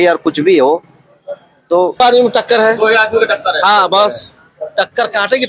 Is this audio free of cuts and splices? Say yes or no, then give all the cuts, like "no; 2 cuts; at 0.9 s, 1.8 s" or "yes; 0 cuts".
no; 1 cut; at 2.0 s